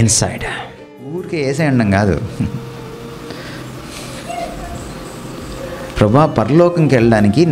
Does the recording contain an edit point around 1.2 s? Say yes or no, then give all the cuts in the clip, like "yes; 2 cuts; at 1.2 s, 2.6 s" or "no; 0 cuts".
yes; 1 cut; at 1.2 s